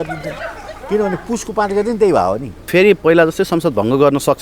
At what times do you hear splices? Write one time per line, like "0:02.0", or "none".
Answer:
0:02.7